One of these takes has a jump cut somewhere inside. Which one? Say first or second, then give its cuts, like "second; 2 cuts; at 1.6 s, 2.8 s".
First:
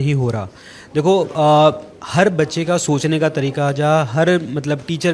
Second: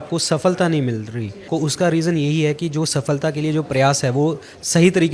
second; 1 cut; at 1.5 s